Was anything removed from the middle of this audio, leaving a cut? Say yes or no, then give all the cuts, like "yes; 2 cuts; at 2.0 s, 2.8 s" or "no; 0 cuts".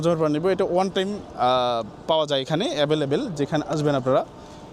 no; 0 cuts